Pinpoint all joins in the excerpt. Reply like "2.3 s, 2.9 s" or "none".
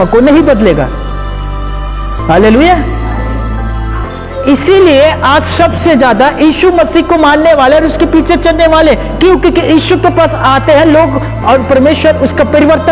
none